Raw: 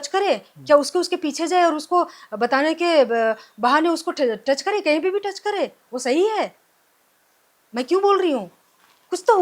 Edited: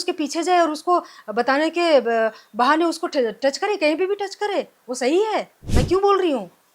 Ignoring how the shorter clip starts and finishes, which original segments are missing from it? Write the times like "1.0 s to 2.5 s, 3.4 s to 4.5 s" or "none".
6.6 s to 7.6 s